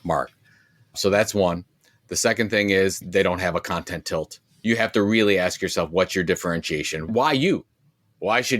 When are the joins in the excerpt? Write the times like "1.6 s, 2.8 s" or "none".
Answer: 3.0 s